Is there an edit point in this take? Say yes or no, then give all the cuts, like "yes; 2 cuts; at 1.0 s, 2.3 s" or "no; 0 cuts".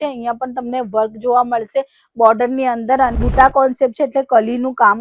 yes; 1 cut; at 3.2 s